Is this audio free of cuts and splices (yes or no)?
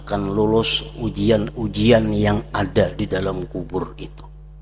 yes